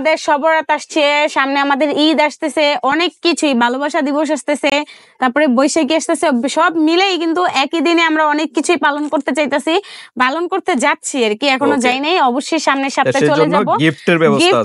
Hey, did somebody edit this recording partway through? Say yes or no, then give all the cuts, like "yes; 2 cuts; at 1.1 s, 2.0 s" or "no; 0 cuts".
no; 0 cuts